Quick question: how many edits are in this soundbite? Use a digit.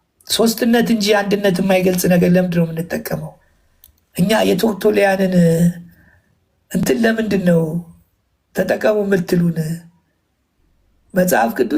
0